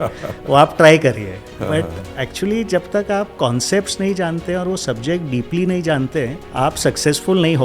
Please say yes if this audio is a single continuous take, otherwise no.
no